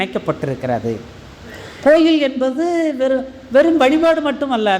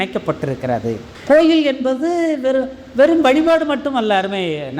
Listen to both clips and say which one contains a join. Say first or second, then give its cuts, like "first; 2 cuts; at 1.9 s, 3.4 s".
second; 1 cut; at 1.1 s